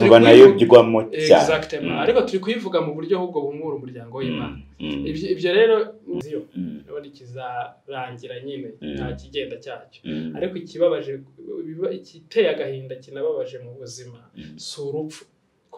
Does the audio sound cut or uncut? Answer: cut